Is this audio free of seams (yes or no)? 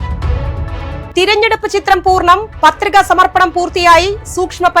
yes